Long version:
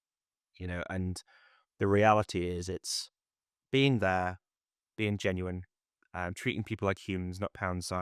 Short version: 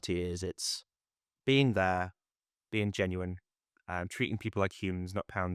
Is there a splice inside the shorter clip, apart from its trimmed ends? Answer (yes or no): no